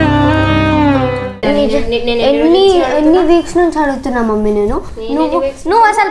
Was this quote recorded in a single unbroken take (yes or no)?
no